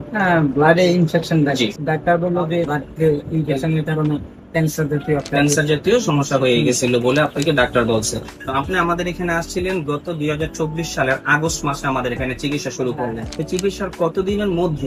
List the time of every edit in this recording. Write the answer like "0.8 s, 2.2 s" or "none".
1.8 s, 2.7 s, 8.4 s, 13.3 s